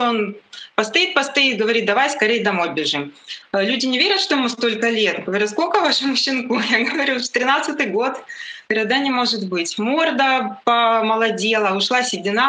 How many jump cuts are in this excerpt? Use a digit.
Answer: 1